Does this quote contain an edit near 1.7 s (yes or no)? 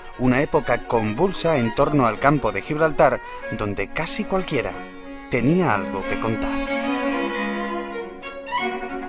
yes